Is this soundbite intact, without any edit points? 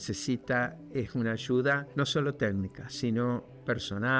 no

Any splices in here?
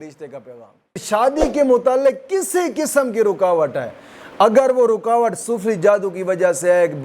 yes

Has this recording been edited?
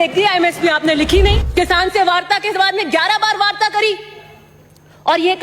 yes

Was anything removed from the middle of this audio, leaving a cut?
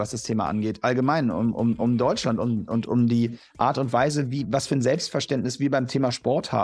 no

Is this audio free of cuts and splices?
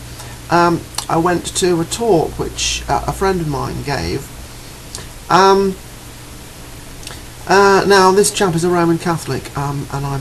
no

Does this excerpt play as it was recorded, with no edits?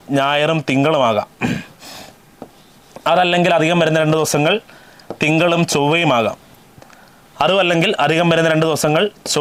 yes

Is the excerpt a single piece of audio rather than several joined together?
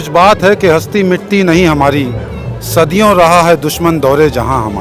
yes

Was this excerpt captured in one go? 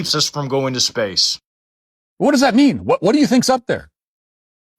yes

